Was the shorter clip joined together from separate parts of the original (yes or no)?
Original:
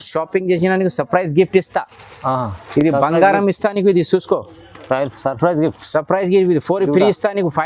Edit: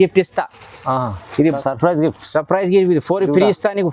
yes